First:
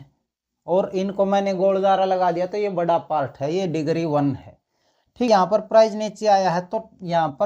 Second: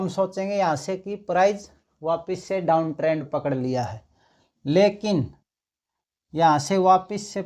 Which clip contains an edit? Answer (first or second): first